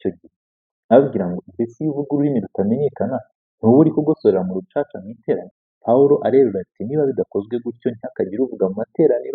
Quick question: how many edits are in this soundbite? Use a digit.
1